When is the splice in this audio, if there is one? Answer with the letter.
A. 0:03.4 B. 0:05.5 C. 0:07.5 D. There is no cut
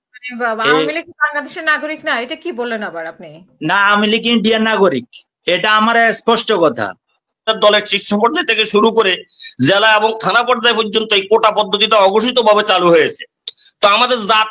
C